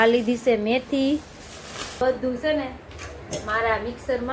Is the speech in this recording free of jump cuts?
no; 1 cut; at 2.0 s

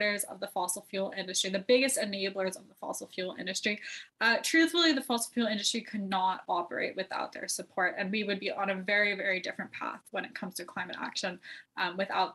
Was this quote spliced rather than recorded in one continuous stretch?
no; 0 cuts

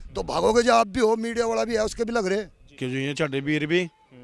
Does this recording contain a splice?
yes; 1 cut; at 2.8 s

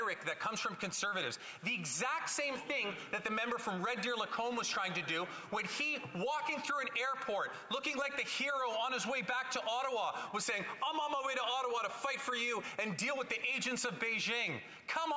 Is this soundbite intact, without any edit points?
yes; 0 cuts

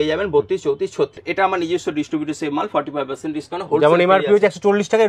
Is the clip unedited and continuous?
no; 1 cut; at 1.2 s

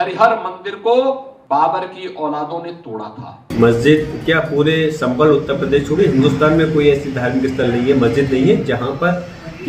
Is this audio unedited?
no; 2 cuts; at 1.3 s, 3.3 s

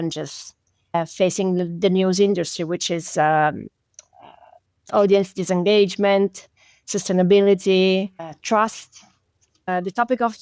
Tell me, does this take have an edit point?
no; 0 cuts

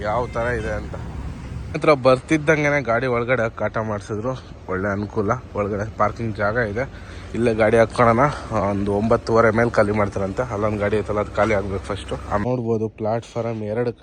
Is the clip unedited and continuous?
no; 2 cuts; at 1.8 s, 12.4 s

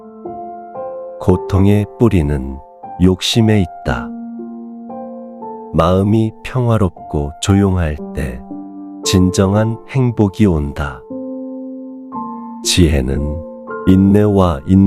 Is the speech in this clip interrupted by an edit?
no; 0 cuts

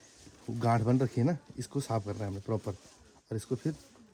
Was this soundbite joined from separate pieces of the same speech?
no; 0 cuts

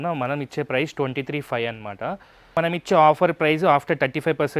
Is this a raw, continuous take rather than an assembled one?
no; 1 cut; at 2.5 s

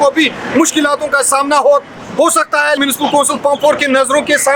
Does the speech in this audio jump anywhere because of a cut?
yes; 1 cut; at 2.8 s

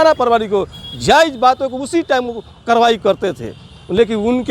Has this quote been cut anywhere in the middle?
no; 0 cuts

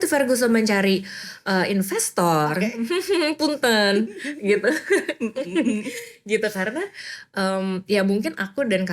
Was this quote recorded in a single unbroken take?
yes; 0 cuts

